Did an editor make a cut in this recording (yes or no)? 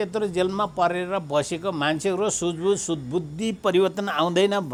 no